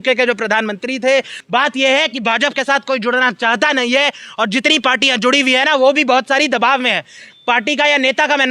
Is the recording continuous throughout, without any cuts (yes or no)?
no